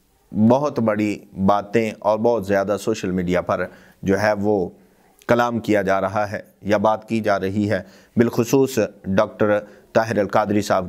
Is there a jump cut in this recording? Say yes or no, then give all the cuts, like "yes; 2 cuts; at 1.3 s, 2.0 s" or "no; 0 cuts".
no; 0 cuts